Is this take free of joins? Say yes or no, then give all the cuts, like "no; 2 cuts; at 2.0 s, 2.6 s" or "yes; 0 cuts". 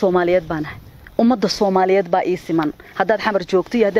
yes; 0 cuts